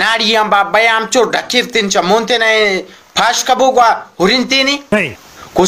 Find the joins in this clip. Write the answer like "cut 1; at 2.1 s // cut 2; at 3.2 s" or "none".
none